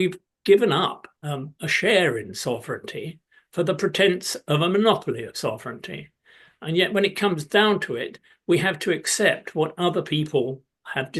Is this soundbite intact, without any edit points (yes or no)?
yes